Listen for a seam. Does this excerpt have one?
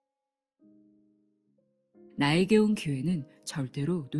yes; 1 cut; at 2.2 s

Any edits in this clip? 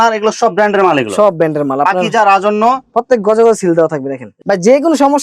yes; 1 cut; at 4.3 s

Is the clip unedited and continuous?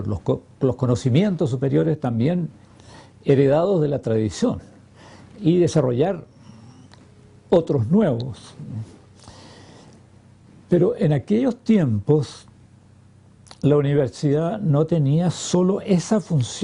no; 1 cut; at 12.1 s

